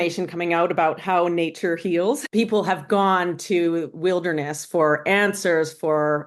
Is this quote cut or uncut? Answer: cut